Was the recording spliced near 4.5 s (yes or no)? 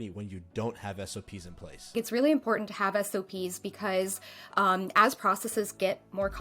no